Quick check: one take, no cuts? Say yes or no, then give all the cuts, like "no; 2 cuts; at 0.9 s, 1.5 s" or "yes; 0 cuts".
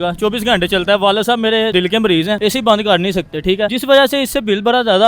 no; 2 cuts; at 1.9 s, 3.8 s